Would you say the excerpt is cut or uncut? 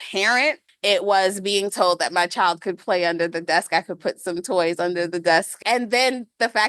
cut